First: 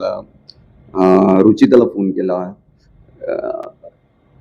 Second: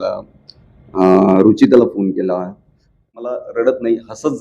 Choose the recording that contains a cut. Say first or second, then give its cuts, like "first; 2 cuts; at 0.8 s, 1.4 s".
second; 1 cut; at 3.2 s